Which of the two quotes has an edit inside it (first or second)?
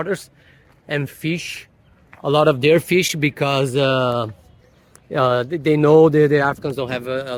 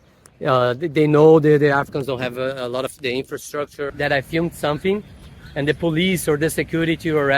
second